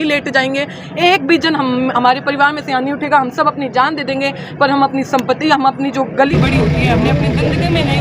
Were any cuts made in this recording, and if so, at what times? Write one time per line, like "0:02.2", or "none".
0:06.3